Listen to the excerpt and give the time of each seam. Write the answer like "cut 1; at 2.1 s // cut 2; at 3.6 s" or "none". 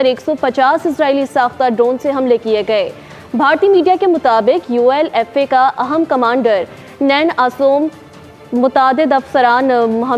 none